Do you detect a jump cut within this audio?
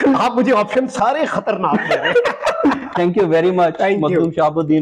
no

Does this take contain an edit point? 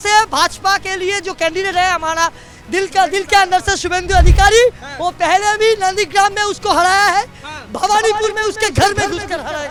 no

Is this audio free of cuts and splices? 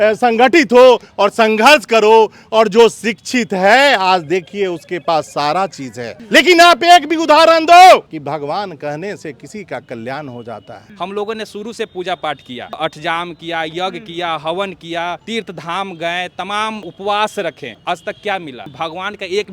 no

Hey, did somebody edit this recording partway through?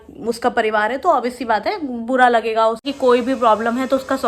yes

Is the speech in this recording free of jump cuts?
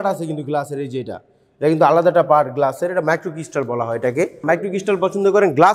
no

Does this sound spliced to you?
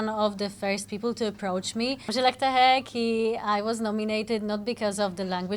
yes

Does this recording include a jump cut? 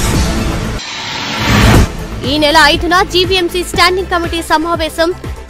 yes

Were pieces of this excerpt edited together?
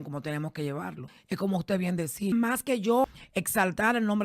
yes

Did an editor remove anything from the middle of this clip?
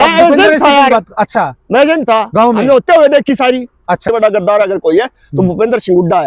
yes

